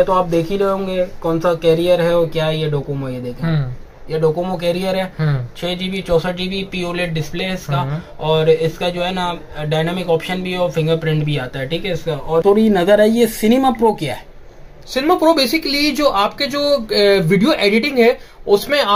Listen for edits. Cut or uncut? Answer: cut